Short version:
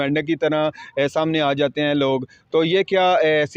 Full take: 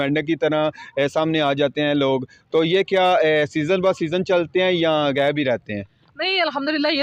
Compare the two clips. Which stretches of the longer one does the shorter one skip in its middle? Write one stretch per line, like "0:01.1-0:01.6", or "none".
none